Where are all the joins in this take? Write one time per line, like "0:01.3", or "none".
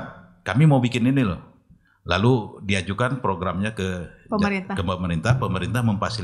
none